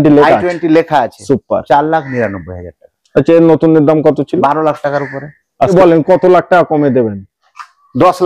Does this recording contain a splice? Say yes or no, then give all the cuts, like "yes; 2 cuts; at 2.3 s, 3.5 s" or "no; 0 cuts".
yes; 1 cut; at 5.7 s